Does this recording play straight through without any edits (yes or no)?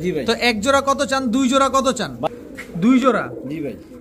no